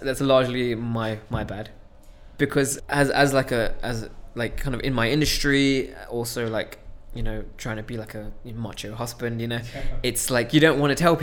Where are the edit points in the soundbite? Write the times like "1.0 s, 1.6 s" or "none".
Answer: 2.8 s